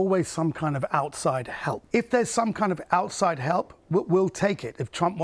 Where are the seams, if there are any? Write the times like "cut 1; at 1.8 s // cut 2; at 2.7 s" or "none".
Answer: cut 1; at 1.8 s